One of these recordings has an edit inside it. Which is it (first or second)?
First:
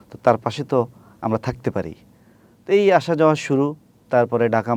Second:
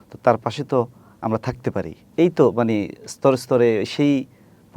second